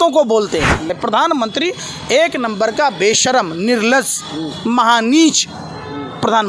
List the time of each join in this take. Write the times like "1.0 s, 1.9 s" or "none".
0.9 s